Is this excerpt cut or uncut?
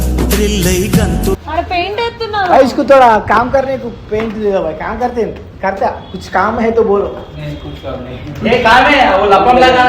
cut